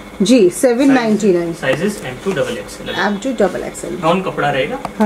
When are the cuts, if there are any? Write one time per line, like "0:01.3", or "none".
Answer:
0:04.0